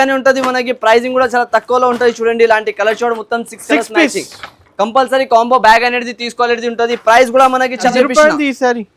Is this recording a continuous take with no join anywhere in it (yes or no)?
no